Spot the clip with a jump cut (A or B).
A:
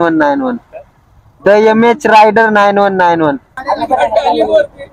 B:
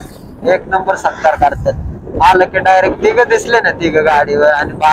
A